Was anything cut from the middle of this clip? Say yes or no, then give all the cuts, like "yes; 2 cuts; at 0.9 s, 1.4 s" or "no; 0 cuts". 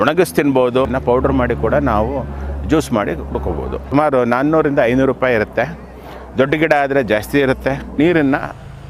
yes; 3 cuts; at 0.9 s, 3.9 s, 8.0 s